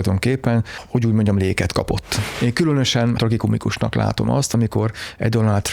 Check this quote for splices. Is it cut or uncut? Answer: cut